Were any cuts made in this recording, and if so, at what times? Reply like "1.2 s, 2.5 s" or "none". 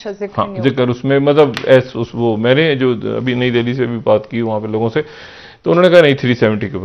none

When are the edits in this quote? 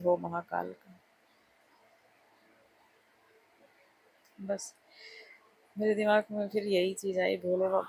none

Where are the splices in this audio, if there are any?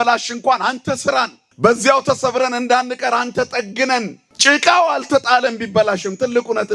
1.4 s, 4.2 s

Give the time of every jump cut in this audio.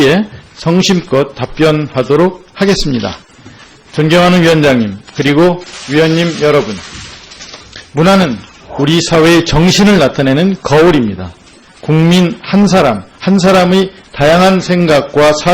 13.9 s

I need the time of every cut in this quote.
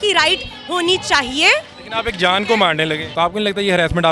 3.1 s

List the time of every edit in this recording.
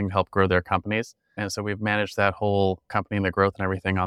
1.4 s, 2.8 s

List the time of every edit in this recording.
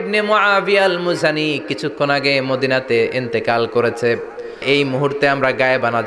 4.6 s

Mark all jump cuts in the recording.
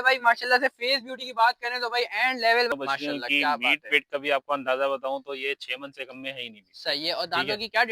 2.7 s

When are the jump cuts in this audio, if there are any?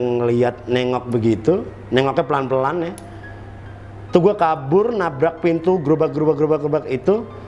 none

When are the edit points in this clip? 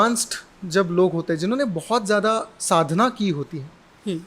none

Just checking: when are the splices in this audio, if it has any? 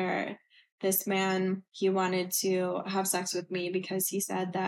1.7 s

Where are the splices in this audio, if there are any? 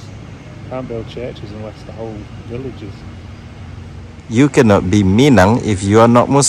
4.1 s

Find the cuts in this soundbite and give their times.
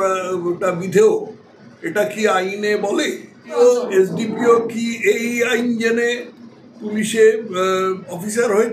3.5 s

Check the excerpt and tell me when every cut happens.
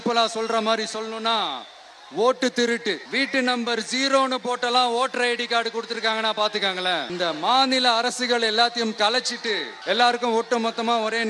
3.0 s, 7.1 s, 9.7 s

